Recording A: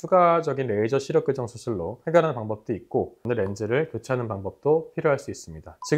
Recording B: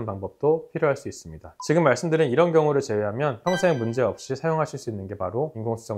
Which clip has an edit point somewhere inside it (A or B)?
A